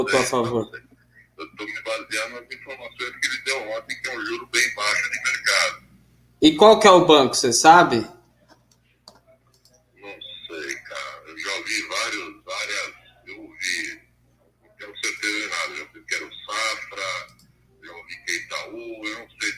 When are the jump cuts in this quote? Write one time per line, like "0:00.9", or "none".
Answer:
none